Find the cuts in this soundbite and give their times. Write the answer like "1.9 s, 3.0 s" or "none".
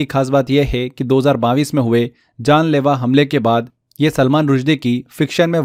none